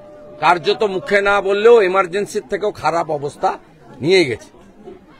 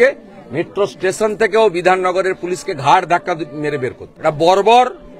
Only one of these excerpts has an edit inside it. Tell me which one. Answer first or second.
second